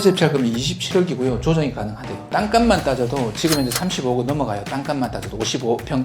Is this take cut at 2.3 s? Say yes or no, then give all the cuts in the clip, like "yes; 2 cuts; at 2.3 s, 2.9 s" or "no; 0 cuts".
yes; 1 cut; at 2.3 s